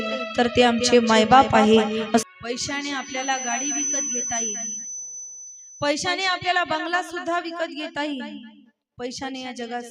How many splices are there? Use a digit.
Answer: 1